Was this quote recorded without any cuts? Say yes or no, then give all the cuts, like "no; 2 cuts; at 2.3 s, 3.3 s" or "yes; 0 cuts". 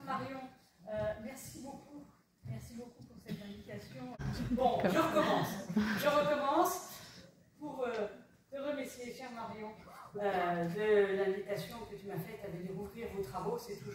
no; 1 cut; at 4.2 s